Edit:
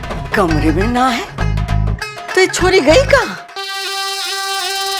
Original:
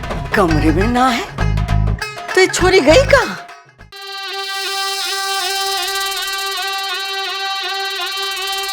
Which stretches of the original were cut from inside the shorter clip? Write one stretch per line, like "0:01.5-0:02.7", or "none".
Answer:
0:03.5-0:04.3